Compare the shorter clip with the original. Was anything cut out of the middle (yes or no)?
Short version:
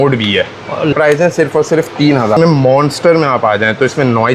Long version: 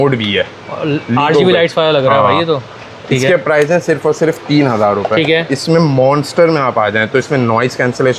yes